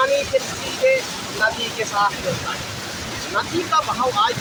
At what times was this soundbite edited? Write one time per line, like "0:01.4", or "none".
none